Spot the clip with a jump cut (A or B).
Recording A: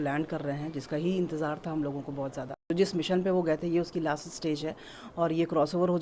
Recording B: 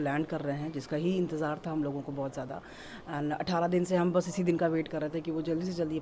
A